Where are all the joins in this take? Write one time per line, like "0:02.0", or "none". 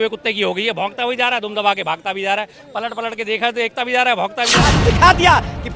0:04.8